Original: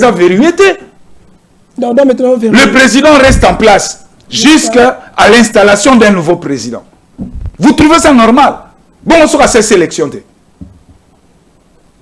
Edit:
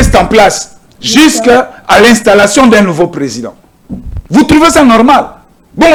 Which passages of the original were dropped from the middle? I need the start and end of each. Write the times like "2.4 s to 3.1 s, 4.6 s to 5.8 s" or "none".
none